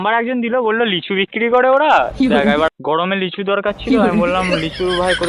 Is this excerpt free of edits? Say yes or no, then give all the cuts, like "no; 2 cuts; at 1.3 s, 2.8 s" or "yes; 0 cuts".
no; 1 cut; at 3.0 s